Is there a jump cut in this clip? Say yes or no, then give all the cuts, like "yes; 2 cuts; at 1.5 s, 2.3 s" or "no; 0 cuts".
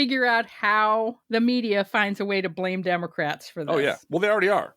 yes; 1 cut; at 1.2 s